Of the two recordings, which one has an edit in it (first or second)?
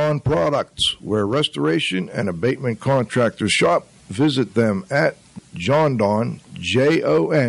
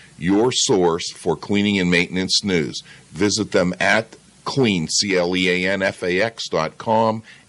first